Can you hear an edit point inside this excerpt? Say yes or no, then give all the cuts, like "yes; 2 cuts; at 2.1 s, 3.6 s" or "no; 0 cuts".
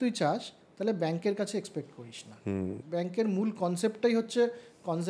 yes; 1 cut; at 2.8 s